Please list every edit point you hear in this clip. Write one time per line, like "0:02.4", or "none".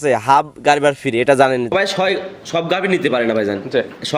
0:01.7